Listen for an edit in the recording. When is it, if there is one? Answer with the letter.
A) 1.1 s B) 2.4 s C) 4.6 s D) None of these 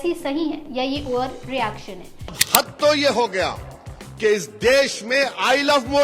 B